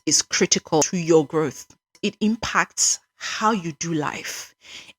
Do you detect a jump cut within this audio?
yes; 2 cuts; at 0.8 s, 1.9 s

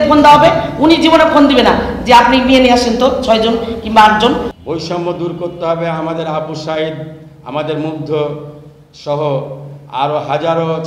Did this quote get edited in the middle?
yes; 1 cut; at 4.5 s

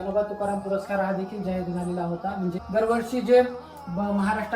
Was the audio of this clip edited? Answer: yes; 1 cut; at 2.6 s

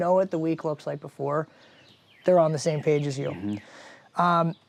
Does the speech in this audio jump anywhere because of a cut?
no; 0 cuts

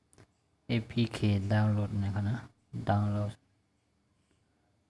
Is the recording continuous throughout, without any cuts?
no; 1 cut; at 1.1 s

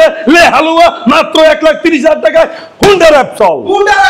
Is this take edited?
no; 0 cuts

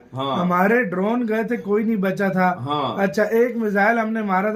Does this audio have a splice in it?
no; 0 cuts

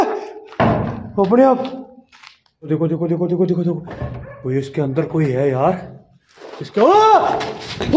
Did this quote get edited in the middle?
yes; 1 cut; at 2.7 s

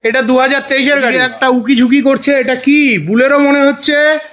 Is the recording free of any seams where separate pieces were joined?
no; 1 cut; at 1.2 s

